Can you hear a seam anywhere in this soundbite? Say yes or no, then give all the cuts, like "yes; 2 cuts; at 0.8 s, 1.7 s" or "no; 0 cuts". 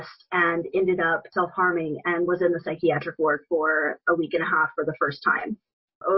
no; 0 cuts